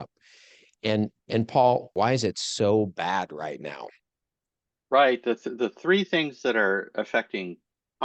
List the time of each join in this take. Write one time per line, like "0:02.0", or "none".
0:01.9